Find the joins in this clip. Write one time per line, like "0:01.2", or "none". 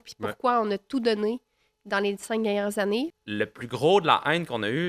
0:03.1